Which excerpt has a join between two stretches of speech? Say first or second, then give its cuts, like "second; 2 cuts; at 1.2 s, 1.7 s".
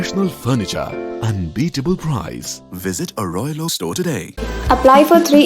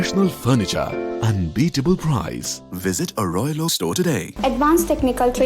second; 1 cut; at 4.3 s